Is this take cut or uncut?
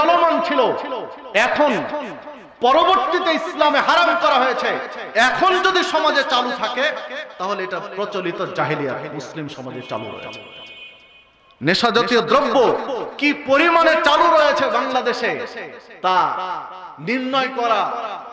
uncut